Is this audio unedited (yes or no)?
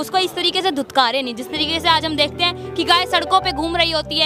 yes